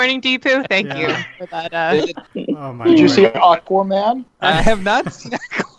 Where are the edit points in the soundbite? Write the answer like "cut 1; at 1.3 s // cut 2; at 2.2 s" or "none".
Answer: cut 1; at 2.3 s // cut 2; at 4.3 s

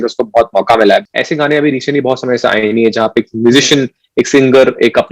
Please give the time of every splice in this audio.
cut 1; at 1.1 s

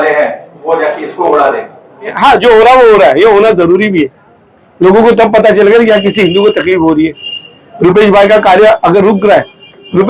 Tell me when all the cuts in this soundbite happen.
cut 1; at 2.1 s

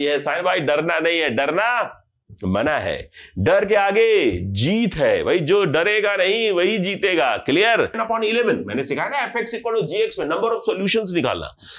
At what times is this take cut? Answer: cut 1; at 8.0 s

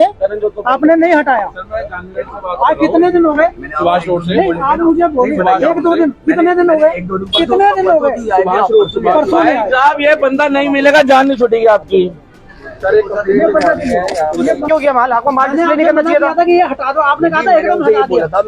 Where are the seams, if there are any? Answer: cut 1; at 14.7 s

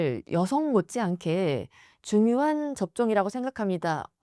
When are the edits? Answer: none

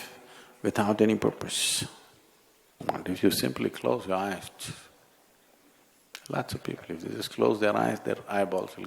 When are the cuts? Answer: cut 1; at 2.8 s

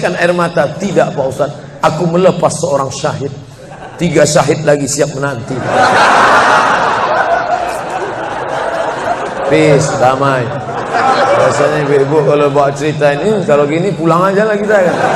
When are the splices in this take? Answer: none

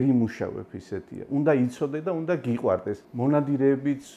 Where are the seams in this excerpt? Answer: cut 1; at 3.0 s

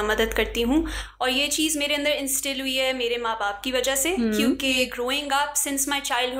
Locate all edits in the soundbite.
none

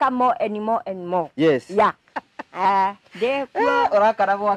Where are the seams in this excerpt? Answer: cut 1; at 2.1 s

